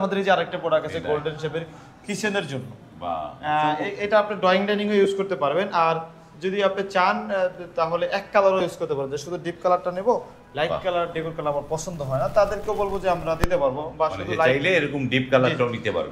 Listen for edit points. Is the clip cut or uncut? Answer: uncut